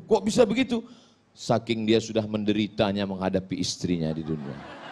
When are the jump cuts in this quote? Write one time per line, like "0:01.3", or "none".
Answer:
none